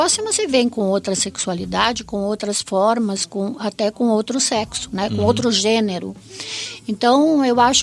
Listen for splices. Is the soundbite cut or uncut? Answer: uncut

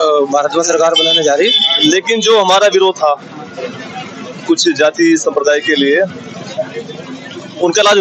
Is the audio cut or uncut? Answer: cut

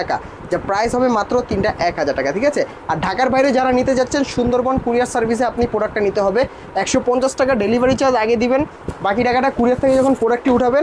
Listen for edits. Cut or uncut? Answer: uncut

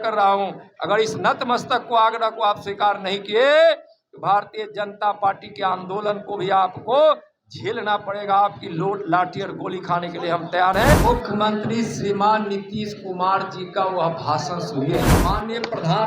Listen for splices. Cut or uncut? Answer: cut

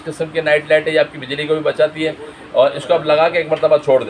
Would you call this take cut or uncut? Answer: uncut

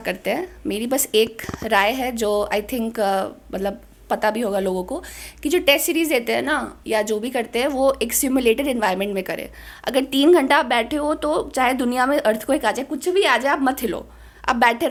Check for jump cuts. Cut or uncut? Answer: uncut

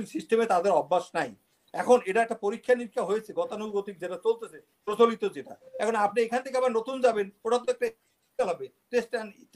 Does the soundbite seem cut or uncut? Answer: uncut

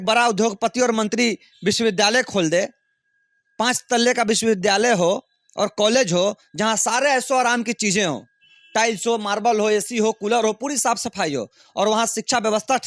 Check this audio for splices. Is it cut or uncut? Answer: uncut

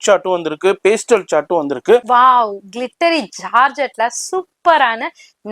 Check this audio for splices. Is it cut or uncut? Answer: cut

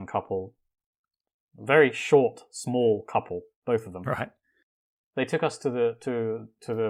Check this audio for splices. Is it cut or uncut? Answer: uncut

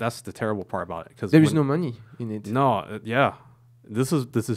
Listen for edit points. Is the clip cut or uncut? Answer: uncut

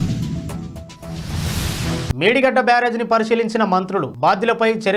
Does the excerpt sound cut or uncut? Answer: uncut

